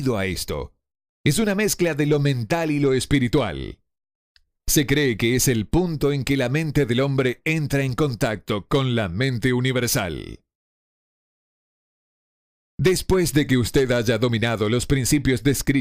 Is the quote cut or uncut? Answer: uncut